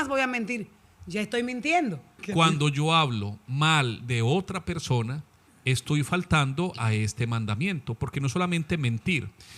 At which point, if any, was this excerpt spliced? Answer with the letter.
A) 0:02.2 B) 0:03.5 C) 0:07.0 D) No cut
A